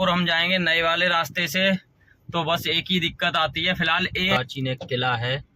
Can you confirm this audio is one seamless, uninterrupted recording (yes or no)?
no